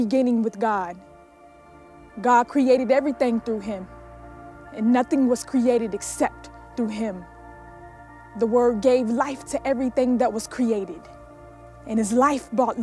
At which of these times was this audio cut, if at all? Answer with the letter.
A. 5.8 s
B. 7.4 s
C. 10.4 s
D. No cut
C